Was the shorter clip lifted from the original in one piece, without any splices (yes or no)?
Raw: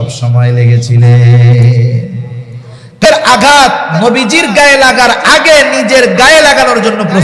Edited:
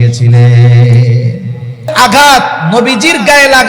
no